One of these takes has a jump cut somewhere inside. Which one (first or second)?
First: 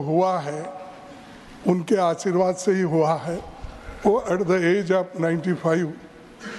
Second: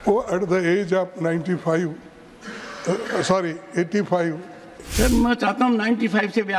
second